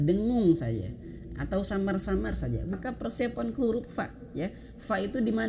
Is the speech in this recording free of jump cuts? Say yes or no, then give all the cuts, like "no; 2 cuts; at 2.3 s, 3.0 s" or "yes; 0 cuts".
no; 1 cut; at 2.8 s